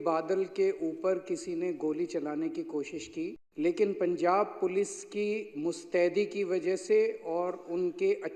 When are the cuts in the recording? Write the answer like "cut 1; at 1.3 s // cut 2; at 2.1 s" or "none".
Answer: cut 1; at 3.4 s

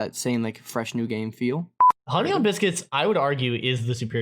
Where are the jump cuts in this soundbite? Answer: cut 1; at 1.8 s

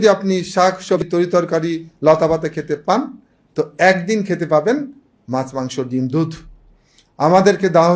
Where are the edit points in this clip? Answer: cut 1; at 1.0 s

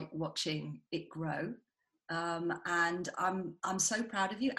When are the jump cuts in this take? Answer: none

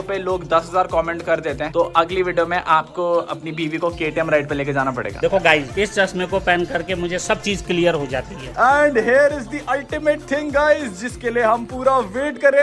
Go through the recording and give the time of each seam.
cut 1; at 1.6 s // cut 2; at 5.2 s // cut 3; at 8.6 s

